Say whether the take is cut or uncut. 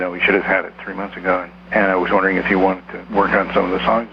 cut